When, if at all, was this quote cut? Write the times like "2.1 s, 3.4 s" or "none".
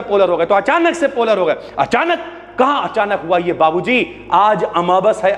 none